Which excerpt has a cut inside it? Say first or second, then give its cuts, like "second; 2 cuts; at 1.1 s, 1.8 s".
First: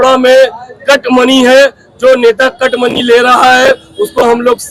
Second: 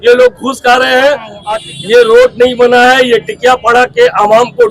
second; 1 cut; at 1.3 s